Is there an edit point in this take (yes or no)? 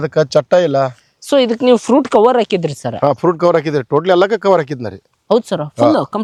no